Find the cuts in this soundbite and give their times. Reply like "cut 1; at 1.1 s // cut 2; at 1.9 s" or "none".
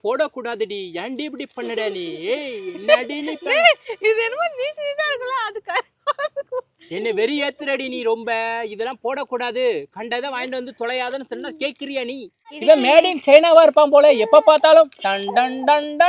cut 1; at 12.5 s

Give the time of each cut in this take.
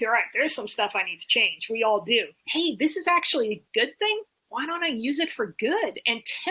cut 1; at 2.4 s

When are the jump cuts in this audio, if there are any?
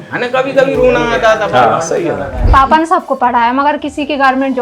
cut 1; at 2.5 s

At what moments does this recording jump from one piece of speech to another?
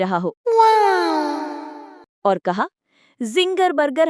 cut 1; at 2.1 s

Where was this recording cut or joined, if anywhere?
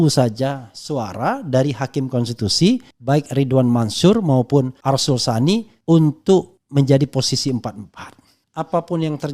cut 1; at 2.9 s // cut 2; at 4.7 s // cut 3; at 5.7 s // cut 4; at 6.6 s // cut 5; at 8.5 s

